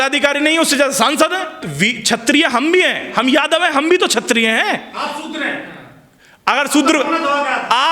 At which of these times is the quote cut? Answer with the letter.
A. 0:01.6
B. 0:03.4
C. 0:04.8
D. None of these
A